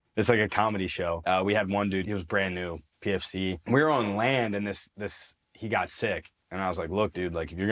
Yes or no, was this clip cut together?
yes